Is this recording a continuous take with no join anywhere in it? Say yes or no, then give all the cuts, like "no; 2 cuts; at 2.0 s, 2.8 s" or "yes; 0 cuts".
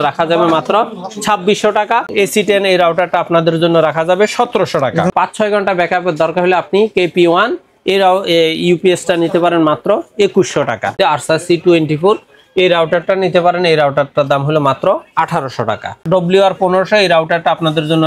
no; 4 cuts; at 2.1 s, 5.1 s, 10.9 s, 16.0 s